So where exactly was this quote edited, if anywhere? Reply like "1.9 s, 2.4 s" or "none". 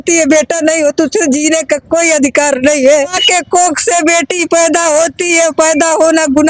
3.2 s